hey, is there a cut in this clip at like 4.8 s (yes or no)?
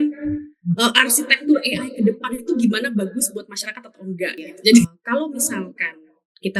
yes